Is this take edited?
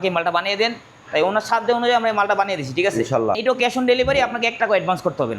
yes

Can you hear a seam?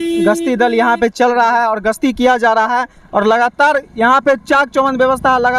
no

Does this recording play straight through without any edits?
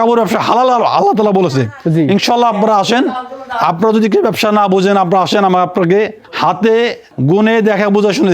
no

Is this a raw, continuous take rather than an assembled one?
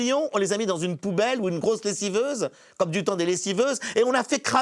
yes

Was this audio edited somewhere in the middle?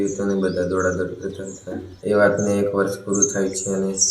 yes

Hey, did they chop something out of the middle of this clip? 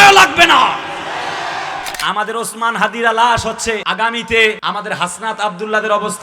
yes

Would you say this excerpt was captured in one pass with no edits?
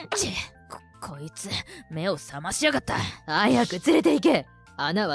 yes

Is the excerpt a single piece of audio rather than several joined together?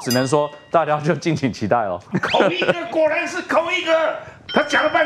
no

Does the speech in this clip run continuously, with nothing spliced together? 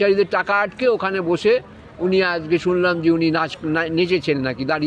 yes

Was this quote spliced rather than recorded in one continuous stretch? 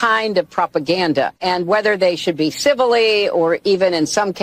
yes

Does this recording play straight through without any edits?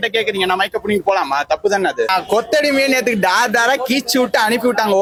yes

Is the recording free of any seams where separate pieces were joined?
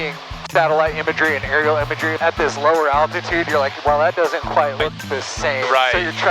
no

